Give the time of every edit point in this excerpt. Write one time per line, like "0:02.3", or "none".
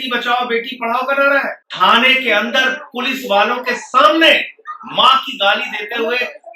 0:01.6